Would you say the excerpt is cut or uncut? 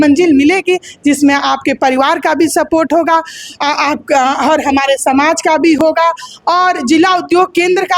uncut